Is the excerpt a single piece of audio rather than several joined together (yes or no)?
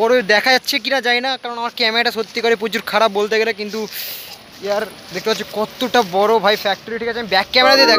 yes